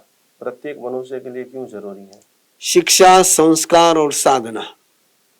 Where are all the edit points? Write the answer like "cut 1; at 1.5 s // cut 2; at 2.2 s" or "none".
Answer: cut 1; at 2.2 s